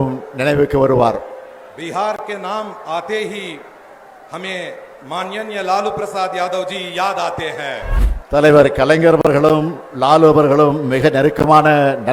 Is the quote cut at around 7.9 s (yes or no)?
yes